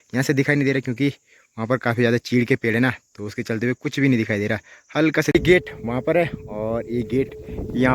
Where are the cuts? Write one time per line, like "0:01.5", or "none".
0:05.3

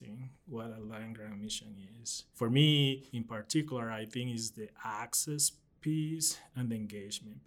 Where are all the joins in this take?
0:02.3
0:03.1

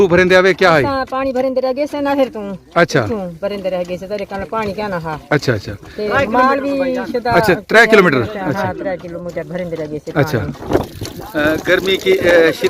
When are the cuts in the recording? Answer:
0:10.7

